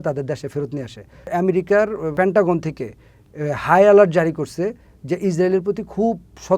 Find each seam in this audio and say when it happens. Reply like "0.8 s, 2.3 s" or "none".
1.1 s